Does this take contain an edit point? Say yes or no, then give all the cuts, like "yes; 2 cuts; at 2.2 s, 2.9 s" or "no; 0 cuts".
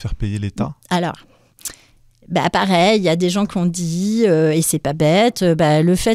no; 0 cuts